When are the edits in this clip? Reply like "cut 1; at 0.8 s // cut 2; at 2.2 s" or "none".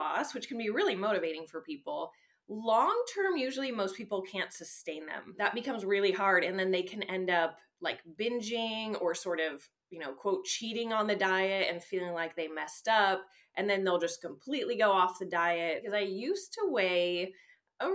cut 1; at 5.4 s // cut 2; at 15.8 s